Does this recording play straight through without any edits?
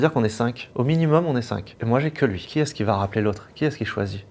no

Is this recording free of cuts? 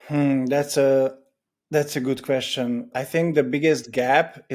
no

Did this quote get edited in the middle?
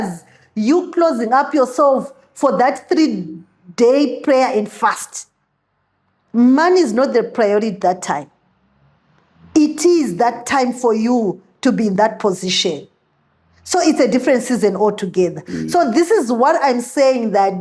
no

